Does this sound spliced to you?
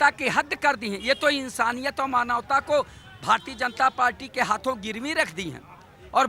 no; 0 cuts

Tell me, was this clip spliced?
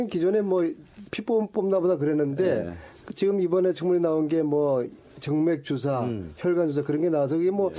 no; 0 cuts

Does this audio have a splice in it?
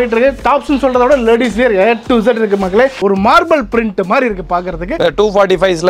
yes; 2 cuts; at 3.0 s, 4.9 s

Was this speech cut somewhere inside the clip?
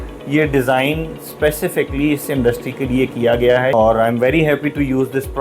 yes; 1 cut; at 3.8 s

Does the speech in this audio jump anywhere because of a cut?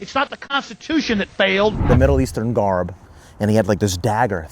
yes; 1 cut; at 1.8 s

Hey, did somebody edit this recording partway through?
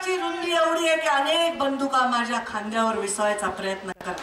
no; 0 cuts

